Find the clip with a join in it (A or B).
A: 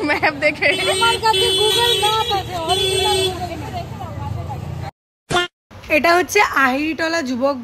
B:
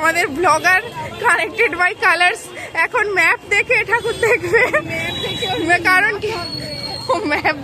A